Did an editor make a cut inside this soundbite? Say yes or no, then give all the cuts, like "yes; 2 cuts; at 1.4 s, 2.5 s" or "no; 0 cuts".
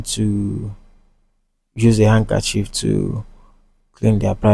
no; 0 cuts